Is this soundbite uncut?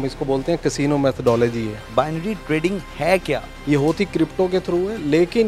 no; 2 cuts; at 1.8 s, 3.5 s

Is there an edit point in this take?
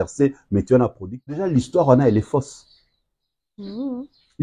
yes; 1 cut; at 1.4 s

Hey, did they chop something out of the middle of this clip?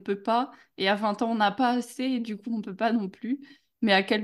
no; 0 cuts

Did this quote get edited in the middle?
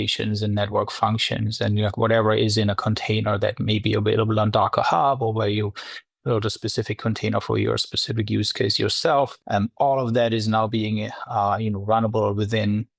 no; 0 cuts

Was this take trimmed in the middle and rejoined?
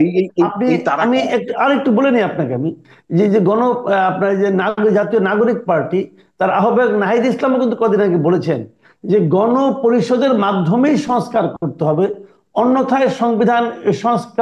no; 0 cuts

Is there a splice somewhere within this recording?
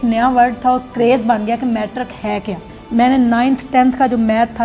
yes; 1 cut; at 2.8 s

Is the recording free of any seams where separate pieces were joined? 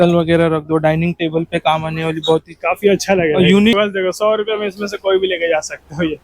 no; 1 cut; at 3.7 s

